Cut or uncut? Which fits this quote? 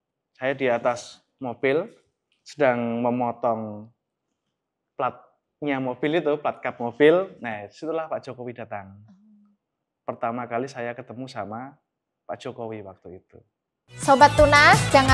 cut